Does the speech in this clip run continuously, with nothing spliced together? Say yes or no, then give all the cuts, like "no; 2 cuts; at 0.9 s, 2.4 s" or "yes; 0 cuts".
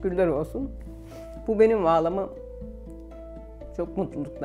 yes; 0 cuts